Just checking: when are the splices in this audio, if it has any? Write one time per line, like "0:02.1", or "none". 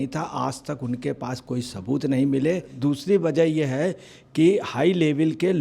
0:02.7